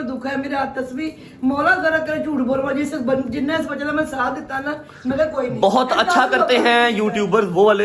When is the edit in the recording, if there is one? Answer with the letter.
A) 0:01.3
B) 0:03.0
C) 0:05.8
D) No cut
D